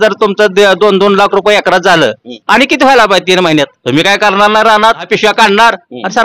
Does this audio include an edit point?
yes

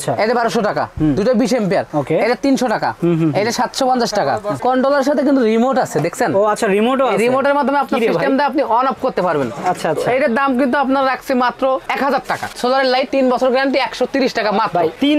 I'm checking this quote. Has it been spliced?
yes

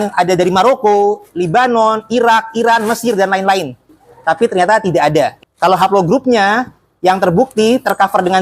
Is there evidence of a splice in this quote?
yes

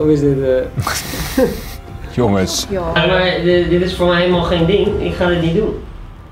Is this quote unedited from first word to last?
no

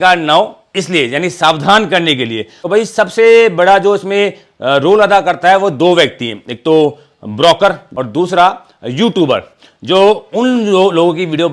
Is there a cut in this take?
yes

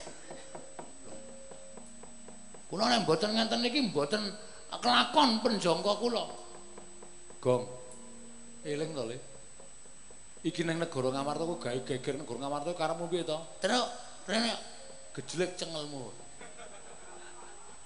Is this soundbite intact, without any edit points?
no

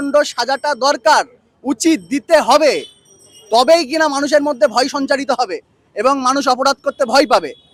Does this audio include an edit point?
no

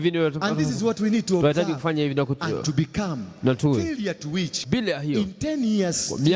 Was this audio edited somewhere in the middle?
yes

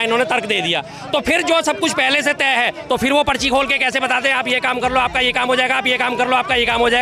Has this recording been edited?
no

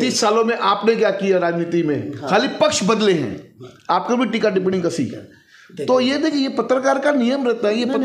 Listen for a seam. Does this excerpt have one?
no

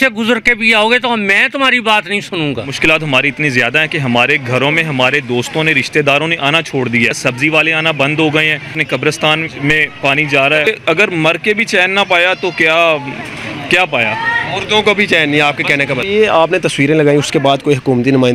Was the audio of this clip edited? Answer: yes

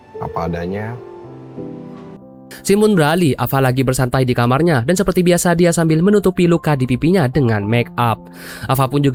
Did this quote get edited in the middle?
no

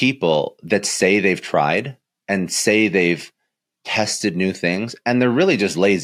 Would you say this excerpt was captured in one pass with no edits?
yes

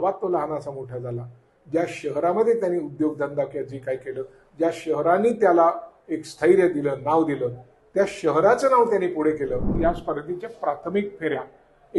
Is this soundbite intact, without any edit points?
no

